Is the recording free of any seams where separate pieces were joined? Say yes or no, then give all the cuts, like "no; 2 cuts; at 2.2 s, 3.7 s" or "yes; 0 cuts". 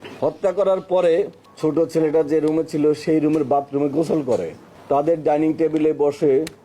no; 2 cuts; at 1.4 s, 4.7 s